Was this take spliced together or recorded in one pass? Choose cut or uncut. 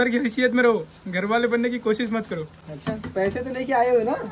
uncut